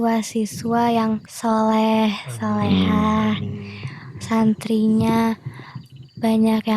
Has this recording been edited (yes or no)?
yes